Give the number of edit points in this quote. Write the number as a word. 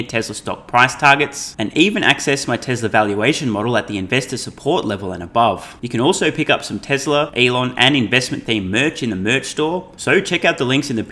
three